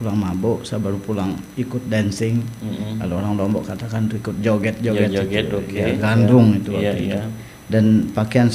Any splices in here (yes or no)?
no